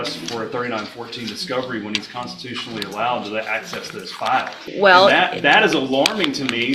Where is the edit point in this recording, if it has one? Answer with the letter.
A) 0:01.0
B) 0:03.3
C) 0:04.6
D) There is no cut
C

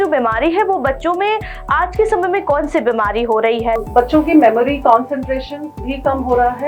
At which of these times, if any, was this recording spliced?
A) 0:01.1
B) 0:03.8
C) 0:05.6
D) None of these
B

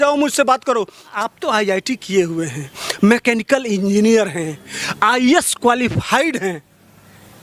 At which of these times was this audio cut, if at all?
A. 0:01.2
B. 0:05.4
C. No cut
A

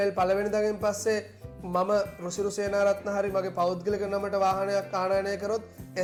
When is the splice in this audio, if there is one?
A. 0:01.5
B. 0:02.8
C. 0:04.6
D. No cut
D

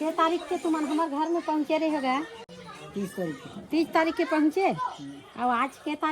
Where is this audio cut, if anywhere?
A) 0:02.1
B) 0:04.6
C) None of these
C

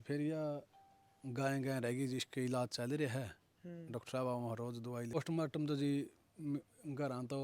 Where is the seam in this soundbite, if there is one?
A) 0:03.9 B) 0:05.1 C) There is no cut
B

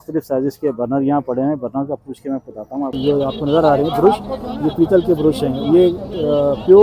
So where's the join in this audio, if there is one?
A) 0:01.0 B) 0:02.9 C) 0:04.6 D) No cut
B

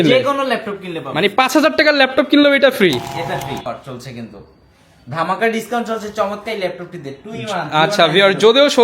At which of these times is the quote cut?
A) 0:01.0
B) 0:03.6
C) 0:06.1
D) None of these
B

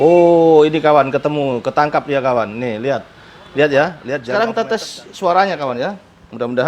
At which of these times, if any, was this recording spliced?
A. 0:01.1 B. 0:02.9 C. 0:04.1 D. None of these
C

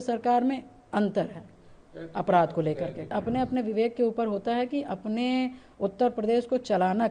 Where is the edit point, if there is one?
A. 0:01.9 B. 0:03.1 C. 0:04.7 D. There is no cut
B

